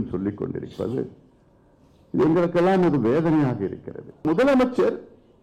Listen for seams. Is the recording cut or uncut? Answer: cut